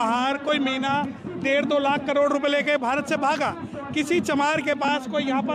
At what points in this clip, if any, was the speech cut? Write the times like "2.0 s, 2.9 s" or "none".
none